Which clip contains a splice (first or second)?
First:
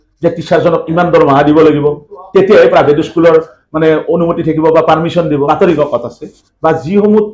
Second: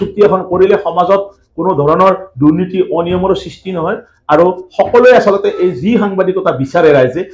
first